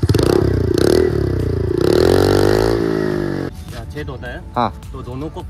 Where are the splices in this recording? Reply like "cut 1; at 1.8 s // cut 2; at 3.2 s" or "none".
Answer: cut 1; at 3.5 s